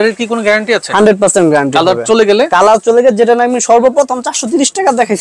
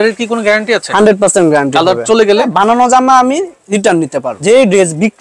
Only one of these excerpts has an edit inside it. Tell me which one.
second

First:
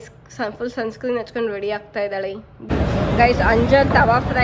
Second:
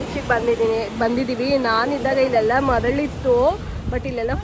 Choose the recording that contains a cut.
first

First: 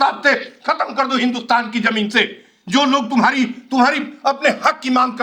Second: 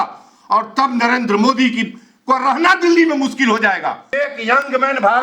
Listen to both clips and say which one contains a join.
second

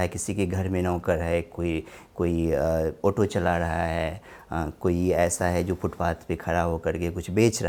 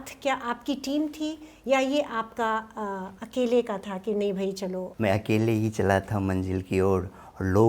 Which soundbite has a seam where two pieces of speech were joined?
second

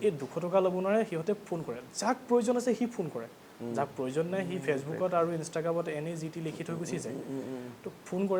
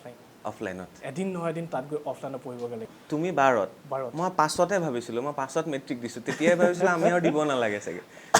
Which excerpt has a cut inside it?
second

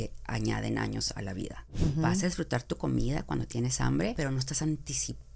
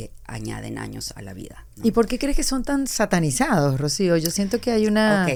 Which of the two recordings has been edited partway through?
first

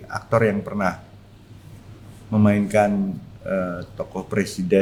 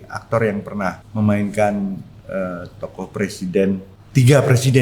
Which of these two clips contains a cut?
second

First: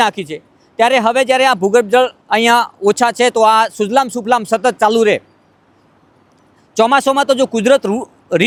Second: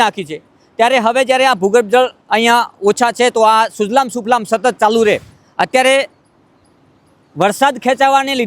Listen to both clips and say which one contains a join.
second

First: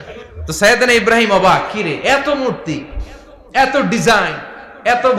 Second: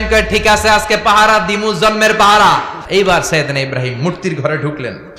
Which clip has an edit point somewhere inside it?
second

